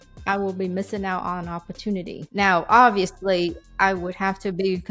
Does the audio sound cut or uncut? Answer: cut